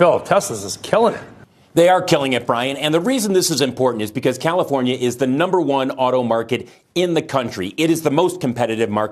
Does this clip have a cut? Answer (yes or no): no